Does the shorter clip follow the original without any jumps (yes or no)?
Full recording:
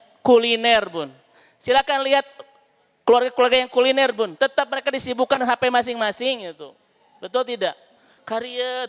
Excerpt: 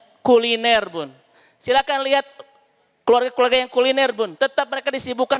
yes